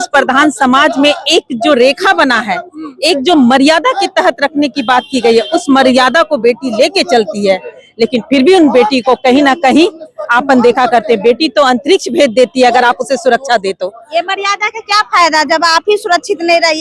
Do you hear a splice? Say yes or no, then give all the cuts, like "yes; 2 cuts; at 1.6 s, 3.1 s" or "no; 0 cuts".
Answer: no; 0 cuts